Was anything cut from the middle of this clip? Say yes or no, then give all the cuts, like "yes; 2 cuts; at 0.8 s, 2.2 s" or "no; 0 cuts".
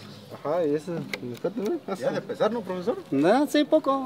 no; 0 cuts